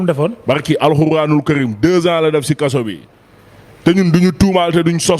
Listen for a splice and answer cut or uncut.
uncut